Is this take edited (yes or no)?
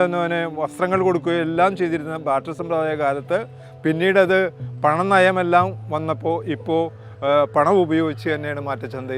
no